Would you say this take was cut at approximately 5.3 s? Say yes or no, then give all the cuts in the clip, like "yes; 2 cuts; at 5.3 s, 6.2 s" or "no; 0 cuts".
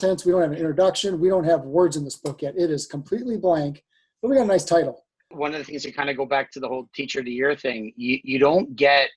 yes; 1 cut; at 5.3 s